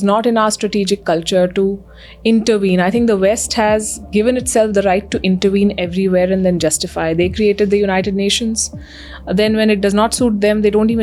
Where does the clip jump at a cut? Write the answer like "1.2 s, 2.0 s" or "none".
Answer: none